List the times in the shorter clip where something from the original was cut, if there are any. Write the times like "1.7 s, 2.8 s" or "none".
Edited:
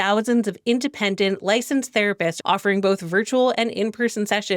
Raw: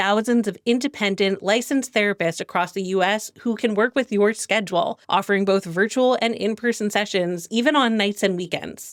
2.4 s